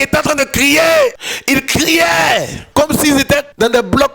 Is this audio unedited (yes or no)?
no